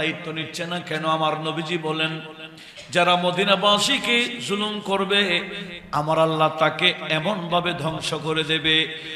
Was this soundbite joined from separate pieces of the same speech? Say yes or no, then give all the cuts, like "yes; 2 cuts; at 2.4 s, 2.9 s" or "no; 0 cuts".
no; 0 cuts